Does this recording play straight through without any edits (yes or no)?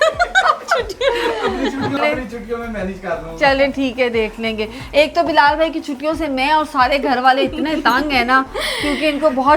no